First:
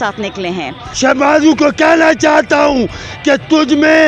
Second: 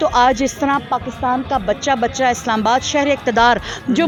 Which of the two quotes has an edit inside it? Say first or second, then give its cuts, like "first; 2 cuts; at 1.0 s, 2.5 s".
first; 1 cut; at 0.9 s